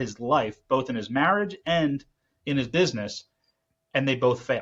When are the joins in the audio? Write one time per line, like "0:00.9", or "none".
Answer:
none